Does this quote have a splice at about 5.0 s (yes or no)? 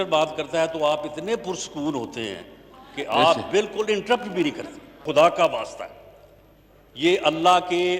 yes